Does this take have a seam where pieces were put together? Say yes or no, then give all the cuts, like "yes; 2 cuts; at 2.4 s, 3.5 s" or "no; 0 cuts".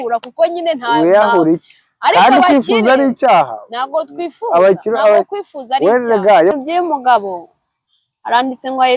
yes; 1 cut; at 6.5 s